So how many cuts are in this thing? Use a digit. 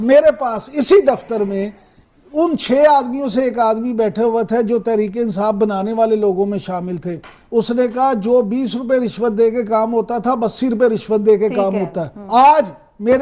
0